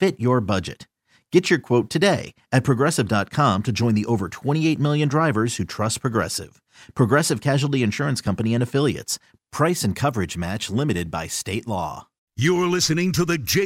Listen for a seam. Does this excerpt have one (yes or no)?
yes